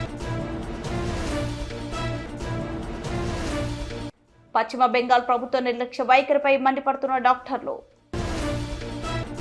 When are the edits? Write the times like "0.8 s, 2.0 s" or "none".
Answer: none